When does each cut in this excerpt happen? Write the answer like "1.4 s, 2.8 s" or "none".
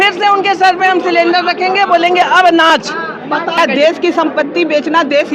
3.6 s